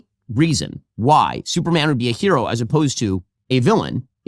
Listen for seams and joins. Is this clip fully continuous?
yes; 0 cuts

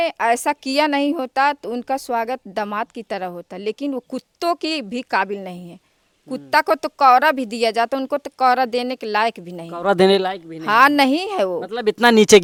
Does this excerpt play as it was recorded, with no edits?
yes; 0 cuts

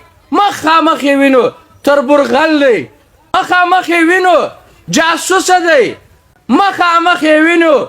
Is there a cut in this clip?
yes; 1 cut; at 3.3 s

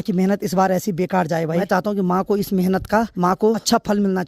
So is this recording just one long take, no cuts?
no; 2 cuts; at 1.6 s, 3.3 s

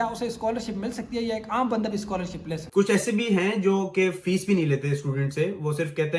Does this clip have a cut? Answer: yes; 1 cut; at 2.6 s

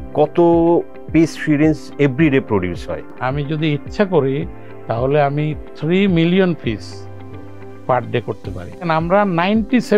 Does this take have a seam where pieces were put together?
yes; 2 cuts; at 3.1 s, 8.9 s

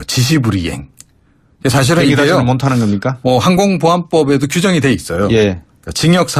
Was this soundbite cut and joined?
no; 0 cuts

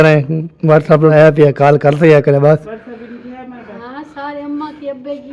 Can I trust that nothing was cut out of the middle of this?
no; 1 cut; at 1.1 s

